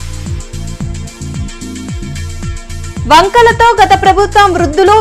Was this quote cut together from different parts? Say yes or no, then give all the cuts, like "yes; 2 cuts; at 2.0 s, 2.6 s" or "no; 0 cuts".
yes; 1 cut; at 1.7 s